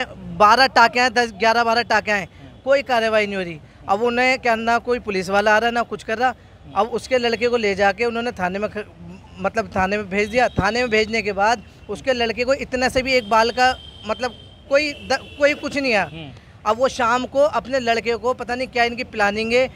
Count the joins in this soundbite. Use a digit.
0